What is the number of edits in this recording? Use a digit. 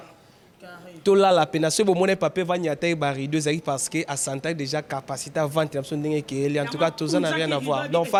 0